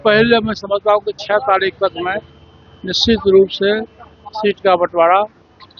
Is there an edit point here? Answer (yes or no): no